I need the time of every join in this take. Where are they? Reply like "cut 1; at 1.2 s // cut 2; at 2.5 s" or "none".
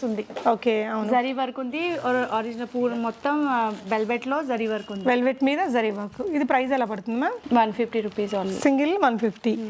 none